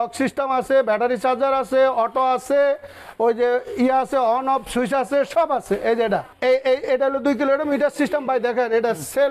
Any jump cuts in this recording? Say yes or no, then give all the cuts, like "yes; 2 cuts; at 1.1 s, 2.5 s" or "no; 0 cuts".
yes; 1 cut; at 6.3 s